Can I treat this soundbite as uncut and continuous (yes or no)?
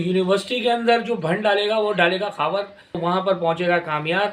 no